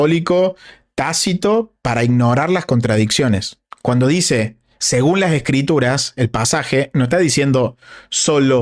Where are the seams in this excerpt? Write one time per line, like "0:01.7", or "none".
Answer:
none